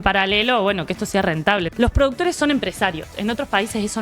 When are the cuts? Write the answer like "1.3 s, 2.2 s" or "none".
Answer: 1.7 s, 3.1 s